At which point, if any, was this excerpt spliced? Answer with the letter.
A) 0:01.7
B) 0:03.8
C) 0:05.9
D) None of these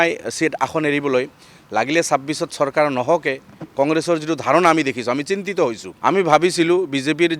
C